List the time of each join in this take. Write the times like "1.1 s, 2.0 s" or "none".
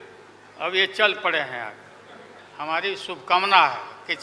2.4 s